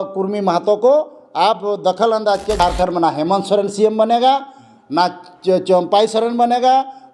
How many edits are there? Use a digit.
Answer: 1